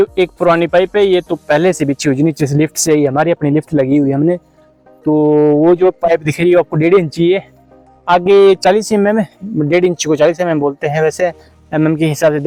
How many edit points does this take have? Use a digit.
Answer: 0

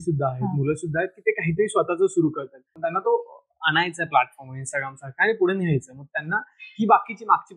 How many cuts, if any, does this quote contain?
1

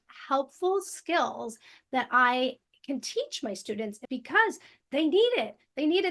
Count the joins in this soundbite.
1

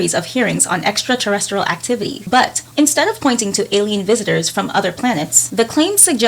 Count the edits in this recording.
2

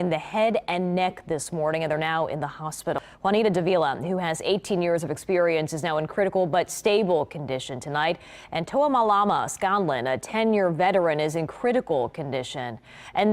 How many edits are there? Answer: 1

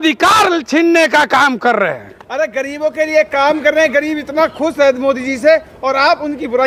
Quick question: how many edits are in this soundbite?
0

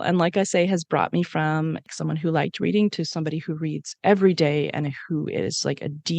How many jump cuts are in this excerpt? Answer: 1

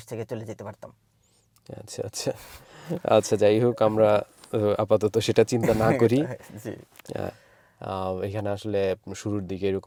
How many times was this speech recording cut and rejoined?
0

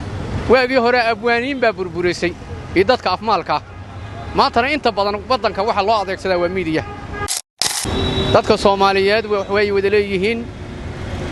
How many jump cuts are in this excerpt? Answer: 1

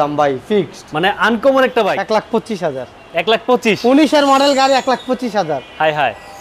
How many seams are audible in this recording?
1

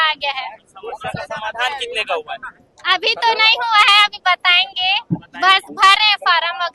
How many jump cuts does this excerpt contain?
0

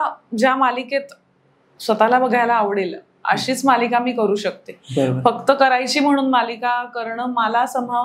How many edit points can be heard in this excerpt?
0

